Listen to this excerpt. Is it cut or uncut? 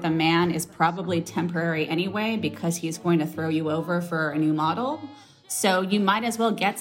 uncut